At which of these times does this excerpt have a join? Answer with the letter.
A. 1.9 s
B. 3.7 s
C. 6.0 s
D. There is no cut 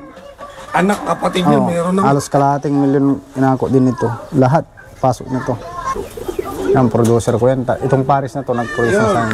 C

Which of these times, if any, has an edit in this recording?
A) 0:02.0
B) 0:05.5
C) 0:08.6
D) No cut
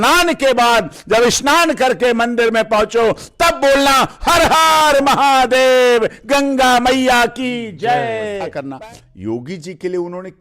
C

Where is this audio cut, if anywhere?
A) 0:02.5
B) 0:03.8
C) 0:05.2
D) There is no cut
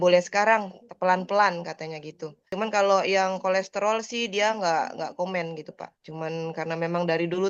A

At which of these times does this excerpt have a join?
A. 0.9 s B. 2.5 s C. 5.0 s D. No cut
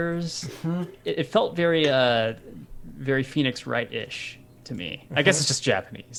D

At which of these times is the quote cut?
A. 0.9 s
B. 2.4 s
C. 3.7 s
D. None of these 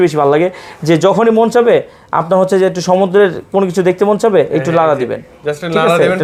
D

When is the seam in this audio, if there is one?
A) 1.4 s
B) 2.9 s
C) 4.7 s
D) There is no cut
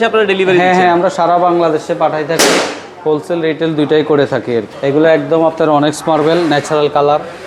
C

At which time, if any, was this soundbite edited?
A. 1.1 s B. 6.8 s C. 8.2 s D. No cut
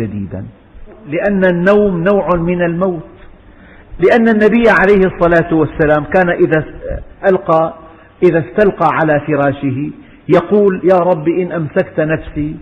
A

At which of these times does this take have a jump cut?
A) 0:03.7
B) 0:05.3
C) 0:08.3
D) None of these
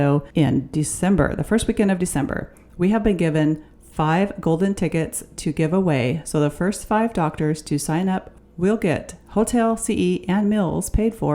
C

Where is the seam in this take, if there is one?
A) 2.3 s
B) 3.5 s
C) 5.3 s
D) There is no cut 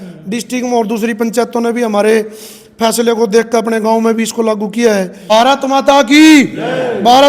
C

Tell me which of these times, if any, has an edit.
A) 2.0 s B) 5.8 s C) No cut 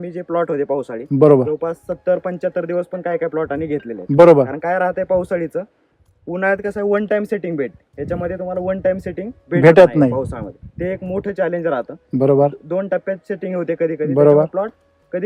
C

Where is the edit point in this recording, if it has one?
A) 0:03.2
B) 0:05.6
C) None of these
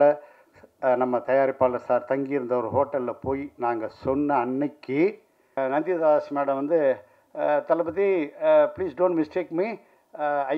B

